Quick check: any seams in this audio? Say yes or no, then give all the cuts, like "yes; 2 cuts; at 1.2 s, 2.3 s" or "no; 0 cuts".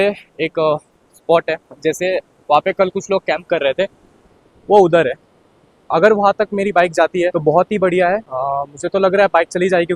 no; 0 cuts